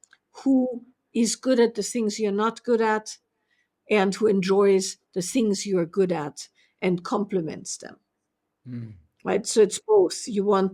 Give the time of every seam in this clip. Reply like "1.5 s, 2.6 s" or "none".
none